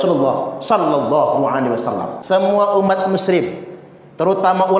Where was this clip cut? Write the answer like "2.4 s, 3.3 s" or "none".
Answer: 2.1 s